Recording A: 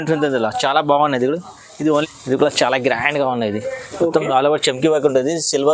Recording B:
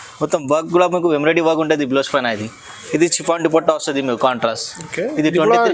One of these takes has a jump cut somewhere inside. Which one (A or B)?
A